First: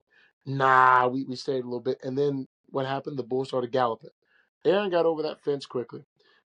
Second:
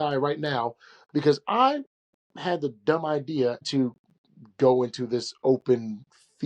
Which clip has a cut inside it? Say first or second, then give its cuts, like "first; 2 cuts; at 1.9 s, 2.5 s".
second; 1 cut; at 3.7 s